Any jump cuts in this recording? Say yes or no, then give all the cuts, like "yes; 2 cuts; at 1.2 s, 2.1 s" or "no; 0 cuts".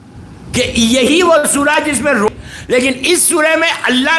yes; 1 cut; at 2.3 s